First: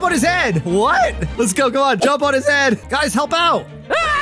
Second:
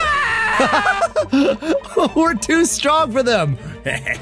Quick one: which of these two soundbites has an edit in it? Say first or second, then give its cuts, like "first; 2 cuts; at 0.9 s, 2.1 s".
first; 2 cuts; at 2.0 s, 2.8 s